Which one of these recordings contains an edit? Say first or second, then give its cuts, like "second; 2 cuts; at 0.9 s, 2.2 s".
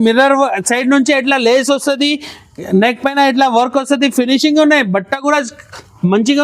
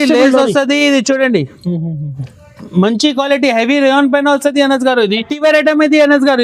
second; 1 cut; at 5.3 s